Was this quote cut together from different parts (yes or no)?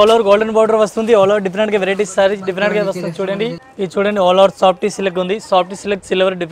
yes